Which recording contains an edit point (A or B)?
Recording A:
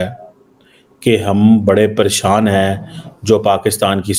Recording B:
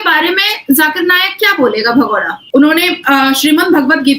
B